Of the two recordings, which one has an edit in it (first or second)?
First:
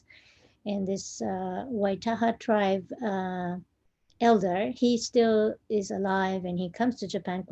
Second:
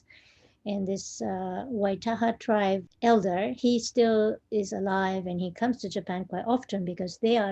second